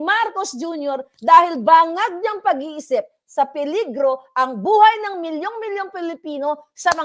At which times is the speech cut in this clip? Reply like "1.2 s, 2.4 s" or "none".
none